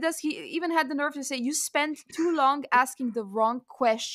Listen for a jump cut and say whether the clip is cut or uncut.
uncut